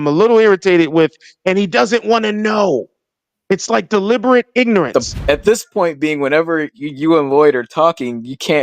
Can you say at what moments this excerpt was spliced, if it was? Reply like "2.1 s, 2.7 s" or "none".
5.1 s